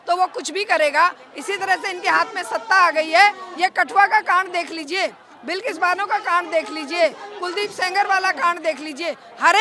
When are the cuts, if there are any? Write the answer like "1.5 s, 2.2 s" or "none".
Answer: none